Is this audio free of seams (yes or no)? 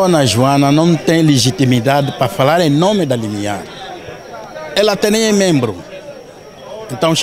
yes